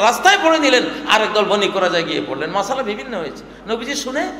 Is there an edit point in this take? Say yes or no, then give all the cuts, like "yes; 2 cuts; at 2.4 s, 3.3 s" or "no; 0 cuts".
no; 0 cuts